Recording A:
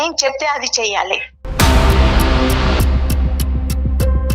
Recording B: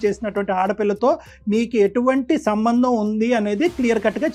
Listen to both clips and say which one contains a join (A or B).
A